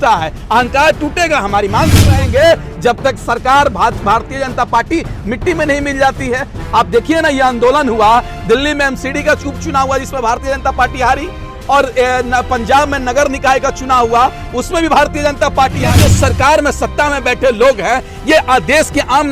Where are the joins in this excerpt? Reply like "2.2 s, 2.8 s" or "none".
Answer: 2.2 s, 15.8 s